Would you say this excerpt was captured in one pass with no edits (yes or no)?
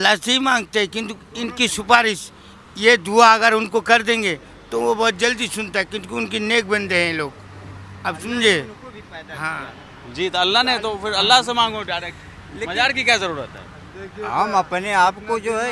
yes